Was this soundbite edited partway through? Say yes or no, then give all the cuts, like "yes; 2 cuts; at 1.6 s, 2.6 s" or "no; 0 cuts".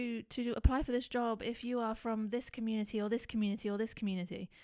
no; 0 cuts